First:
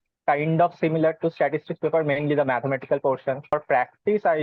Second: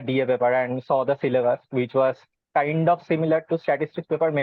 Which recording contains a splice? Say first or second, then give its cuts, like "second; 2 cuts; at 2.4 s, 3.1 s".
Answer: first; 1 cut; at 3.5 s